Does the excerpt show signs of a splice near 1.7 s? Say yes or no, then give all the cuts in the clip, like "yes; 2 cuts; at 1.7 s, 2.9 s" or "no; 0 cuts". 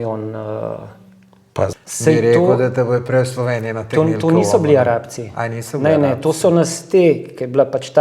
yes; 1 cut; at 1.7 s